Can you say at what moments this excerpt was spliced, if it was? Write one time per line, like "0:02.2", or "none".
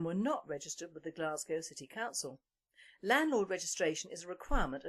0:01.5